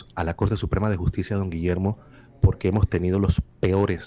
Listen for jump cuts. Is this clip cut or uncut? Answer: uncut